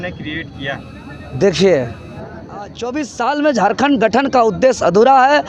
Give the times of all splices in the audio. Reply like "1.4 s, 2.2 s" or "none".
2.8 s